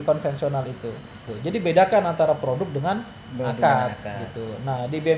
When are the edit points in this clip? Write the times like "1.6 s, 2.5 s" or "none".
1.3 s